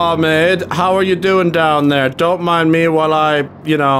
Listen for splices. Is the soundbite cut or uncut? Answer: uncut